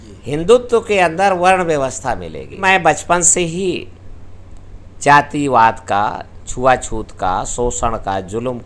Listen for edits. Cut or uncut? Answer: cut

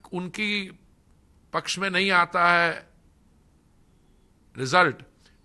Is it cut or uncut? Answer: uncut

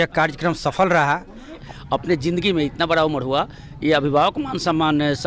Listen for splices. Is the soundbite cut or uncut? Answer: cut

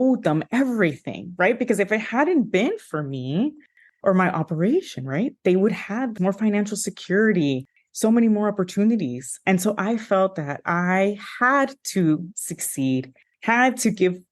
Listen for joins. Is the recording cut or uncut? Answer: cut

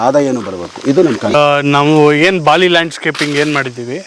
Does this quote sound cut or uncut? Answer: cut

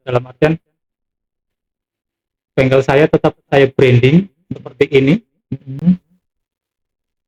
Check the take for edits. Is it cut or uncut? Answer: uncut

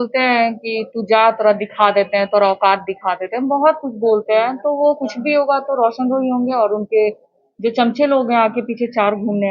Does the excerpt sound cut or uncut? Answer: uncut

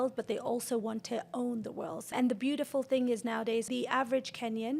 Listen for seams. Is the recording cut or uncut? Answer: cut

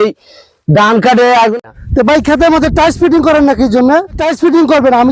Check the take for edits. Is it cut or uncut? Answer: cut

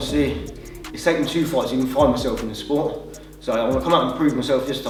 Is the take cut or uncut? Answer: uncut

